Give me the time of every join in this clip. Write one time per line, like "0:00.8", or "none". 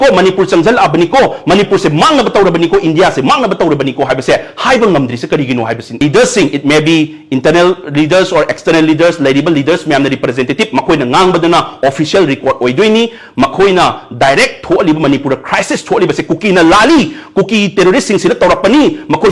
0:06.0

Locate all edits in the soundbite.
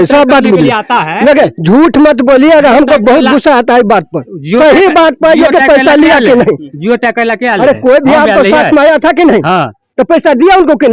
none

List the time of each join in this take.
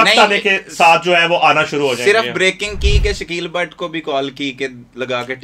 none

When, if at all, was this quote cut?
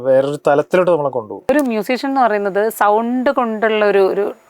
0:01.4

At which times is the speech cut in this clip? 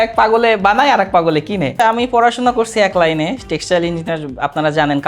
0:01.8

